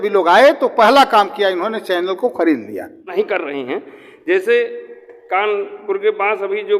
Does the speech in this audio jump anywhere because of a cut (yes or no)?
yes